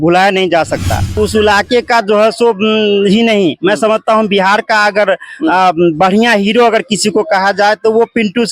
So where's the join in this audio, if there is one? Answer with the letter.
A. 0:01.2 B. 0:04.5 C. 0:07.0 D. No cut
A